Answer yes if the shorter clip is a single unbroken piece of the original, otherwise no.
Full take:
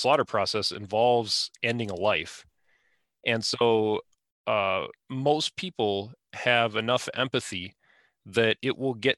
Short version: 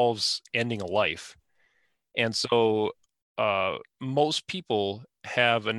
yes